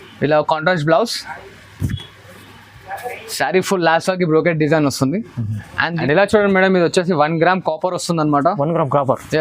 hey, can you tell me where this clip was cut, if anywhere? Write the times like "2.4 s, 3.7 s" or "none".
6.0 s